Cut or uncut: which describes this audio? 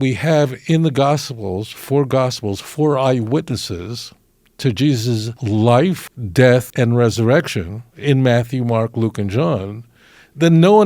cut